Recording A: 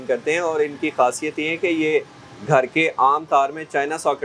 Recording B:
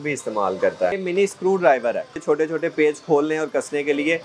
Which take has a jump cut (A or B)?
B